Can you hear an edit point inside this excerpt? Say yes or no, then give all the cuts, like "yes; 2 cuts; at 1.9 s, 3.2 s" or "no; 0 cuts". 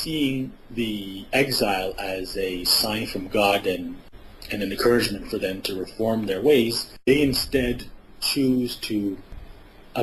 no; 0 cuts